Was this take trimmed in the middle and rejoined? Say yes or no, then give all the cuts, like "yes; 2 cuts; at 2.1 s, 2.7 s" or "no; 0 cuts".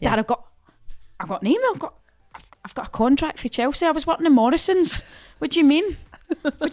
no; 0 cuts